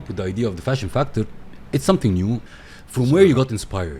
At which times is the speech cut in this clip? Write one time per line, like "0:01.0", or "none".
0:02.5